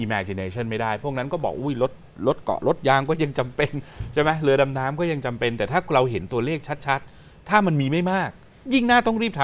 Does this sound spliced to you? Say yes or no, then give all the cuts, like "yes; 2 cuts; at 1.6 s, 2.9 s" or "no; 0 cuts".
no; 0 cuts